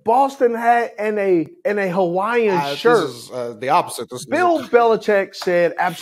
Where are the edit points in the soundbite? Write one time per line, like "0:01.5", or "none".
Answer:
0:01.6
0:04.0